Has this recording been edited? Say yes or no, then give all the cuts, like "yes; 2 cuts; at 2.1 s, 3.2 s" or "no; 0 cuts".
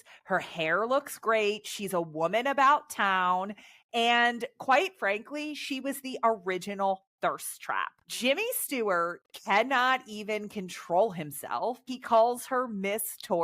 yes; 1 cut; at 11.9 s